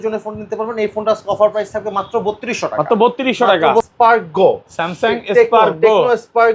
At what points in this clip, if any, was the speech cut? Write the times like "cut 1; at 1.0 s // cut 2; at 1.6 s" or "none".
cut 1; at 3.9 s